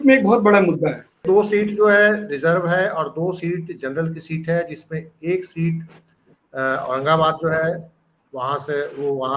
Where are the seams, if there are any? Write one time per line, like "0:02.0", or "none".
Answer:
0:01.2